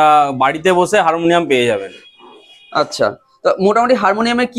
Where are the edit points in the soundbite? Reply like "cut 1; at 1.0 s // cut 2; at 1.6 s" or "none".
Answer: none